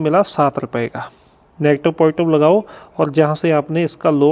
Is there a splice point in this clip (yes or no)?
no